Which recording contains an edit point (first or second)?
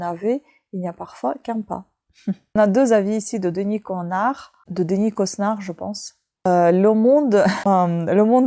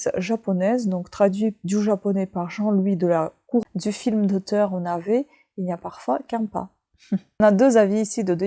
second